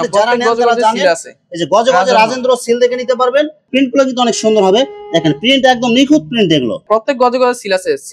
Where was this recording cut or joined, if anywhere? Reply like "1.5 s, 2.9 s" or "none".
3.7 s, 6.9 s